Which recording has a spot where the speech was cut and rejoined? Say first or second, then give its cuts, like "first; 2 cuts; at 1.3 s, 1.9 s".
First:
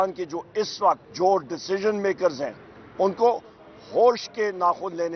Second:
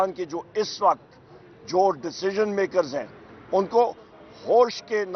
first; 1 cut; at 1.1 s